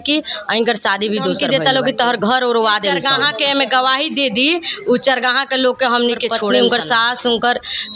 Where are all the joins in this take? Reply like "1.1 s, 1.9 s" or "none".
1.4 s, 3.0 s, 6.4 s